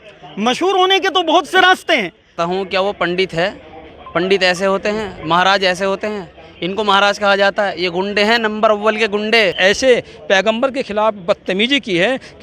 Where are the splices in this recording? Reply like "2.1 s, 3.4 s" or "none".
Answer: 2.3 s, 9.6 s